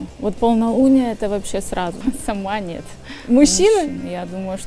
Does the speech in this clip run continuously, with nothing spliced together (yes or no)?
no